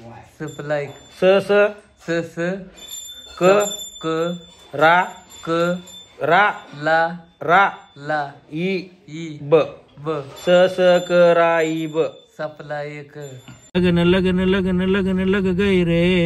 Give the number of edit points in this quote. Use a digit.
1